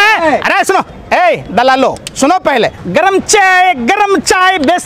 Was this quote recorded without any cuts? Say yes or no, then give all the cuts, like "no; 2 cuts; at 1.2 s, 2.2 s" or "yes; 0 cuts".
no; 1 cut; at 2.8 s